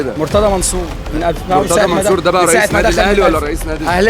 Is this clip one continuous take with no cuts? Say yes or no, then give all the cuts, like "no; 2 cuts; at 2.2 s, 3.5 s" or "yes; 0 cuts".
yes; 0 cuts